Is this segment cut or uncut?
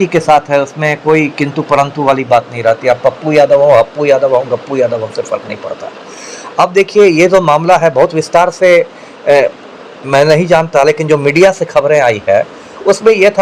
uncut